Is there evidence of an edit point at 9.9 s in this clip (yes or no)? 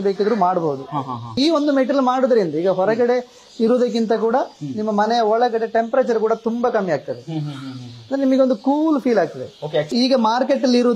yes